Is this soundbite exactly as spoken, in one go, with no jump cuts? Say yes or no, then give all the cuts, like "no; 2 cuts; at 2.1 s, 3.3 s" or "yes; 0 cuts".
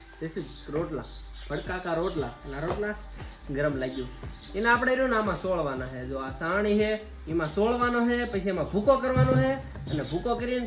yes; 0 cuts